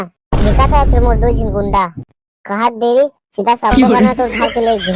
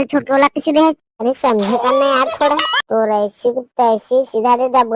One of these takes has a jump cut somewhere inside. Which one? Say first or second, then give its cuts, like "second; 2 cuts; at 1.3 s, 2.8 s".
second; 1 cut; at 2.7 s